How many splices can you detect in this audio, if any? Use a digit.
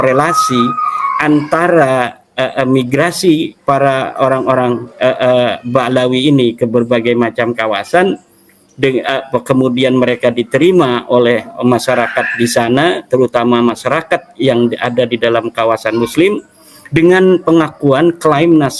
0